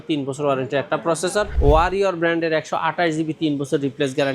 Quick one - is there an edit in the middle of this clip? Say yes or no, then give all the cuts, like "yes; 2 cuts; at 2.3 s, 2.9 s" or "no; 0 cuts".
yes; 1 cut; at 1.5 s